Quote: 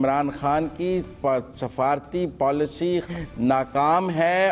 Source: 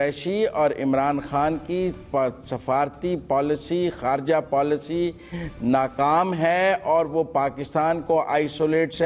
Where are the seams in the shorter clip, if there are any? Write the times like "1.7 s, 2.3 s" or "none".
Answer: 3.1 s